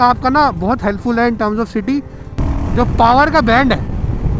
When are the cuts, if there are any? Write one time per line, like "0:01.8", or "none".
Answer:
0:02.2